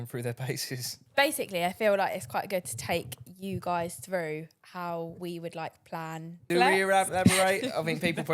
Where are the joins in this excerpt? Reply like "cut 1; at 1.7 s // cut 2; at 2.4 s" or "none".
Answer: cut 1; at 1.0 s // cut 2; at 6.4 s